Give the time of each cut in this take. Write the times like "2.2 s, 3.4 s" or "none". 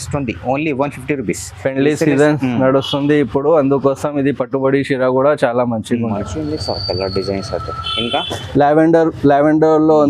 6.2 s

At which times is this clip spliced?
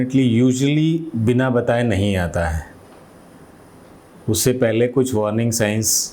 none

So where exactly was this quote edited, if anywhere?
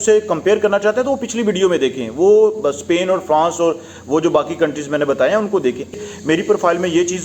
6.0 s

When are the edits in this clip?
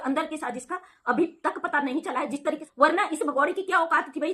2.7 s

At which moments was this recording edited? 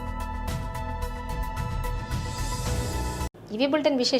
none

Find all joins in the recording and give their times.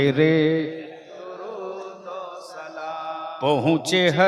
none

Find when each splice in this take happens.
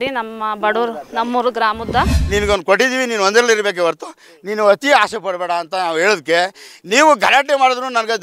2.2 s

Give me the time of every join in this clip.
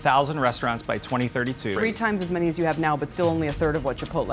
1.7 s

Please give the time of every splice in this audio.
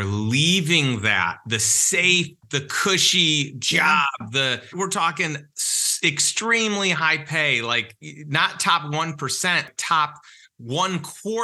9.7 s

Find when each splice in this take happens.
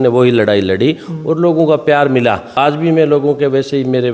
2.5 s

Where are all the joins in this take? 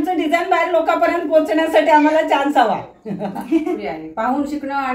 3.8 s

